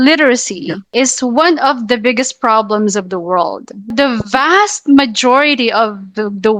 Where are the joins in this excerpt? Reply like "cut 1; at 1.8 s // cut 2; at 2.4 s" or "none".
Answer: cut 1; at 0.8 s // cut 2; at 3.9 s